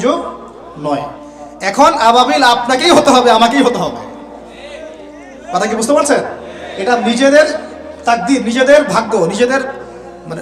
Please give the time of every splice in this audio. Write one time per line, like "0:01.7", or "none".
none

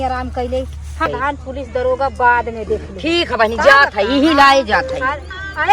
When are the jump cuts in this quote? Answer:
0:01.1

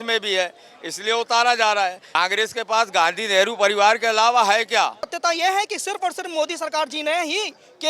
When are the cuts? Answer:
0:02.0
0:05.1

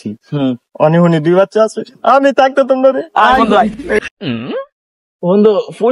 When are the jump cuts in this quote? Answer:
0:04.0

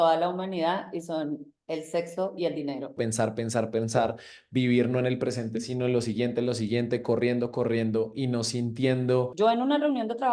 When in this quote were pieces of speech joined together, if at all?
0:03.0
0:09.3

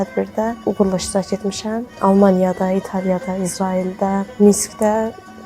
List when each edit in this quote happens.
0:01.9

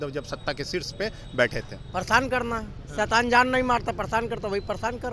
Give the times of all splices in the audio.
0:01.8

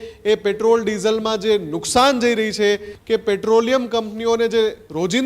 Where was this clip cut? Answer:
0:02.9

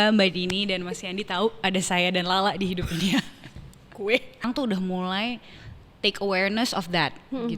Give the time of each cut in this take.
0:04.4

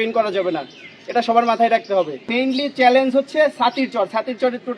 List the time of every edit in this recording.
0:02.3

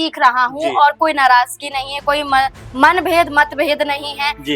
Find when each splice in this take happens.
none

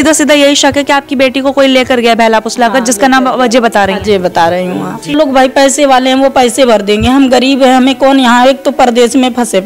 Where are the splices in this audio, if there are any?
0:05.1

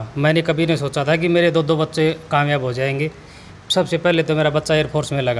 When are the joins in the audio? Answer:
none

